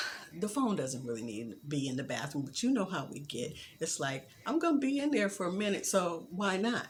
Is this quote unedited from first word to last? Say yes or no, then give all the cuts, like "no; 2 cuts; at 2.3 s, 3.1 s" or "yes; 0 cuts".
yes; 0 cuts